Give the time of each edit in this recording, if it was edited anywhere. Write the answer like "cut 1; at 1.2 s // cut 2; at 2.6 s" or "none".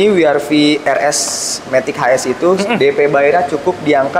none

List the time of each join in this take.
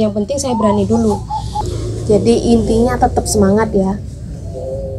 cut 1; at 1.6 s

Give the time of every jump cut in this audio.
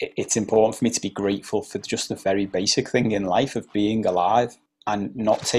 cut 1; at 4.7 s

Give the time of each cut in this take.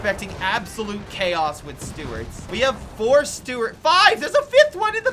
cut 1; at 2.4 s

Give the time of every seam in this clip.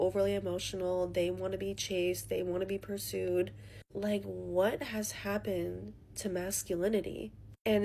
cut 1; at 4.3 s

